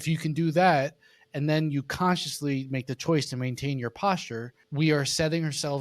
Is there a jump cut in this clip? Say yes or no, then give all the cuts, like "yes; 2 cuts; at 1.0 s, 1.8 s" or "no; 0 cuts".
yes; 1 cut; at 4.6 s